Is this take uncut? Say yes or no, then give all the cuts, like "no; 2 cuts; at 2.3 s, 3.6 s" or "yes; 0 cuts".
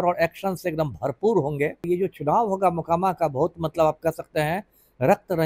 no; 1 cut; at 1.8 s